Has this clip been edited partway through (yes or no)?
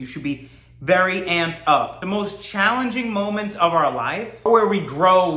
yes